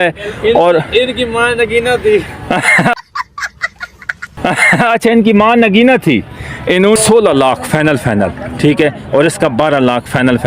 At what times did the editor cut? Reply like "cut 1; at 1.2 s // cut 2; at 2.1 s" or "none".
cut 1; at 7.0 s

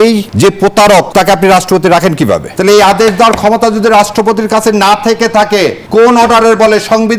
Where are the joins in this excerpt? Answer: cut 1; at 0.8 s // cut 2; at 2.5 s // cut 3; at 5.8 s

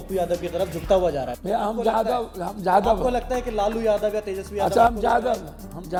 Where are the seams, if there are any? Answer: none

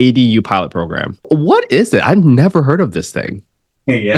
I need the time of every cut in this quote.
cut 1; at 1.2 s

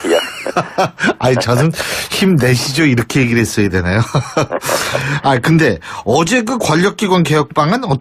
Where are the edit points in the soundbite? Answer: none

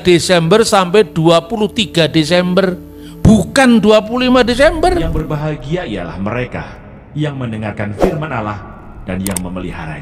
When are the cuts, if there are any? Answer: cut 1; at 5.1 s

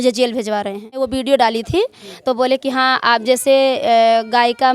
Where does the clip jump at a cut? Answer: cut 1; at 1.0 s

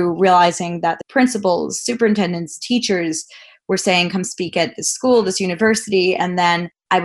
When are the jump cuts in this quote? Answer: cut 1; at 1.0 s

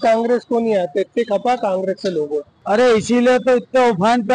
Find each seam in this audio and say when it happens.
cut 1; at 2.5 s

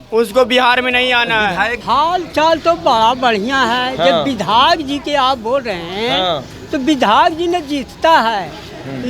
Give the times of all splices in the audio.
cut 1; at 1.8 s

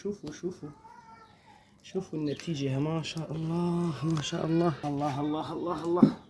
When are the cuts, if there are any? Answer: cut 1; at 4.8 s

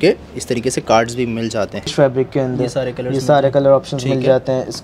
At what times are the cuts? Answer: cut 1; at 1.9 s

